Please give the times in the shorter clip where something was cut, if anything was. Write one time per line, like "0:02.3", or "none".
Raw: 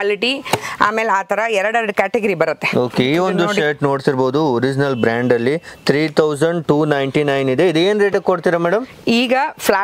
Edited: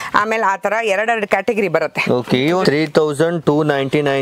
0:02.6